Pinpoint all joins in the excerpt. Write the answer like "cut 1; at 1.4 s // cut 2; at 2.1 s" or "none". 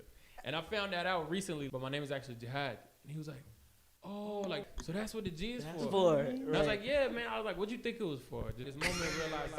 cut 1; at 1.7 s // cut 2; at 4.7 s // cut 3; at 8.7 s